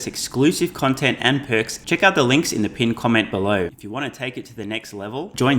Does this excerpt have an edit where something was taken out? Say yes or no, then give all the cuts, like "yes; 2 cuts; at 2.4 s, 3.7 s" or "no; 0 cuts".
yes; 2 cuts; at 1.8 s, 3.7 s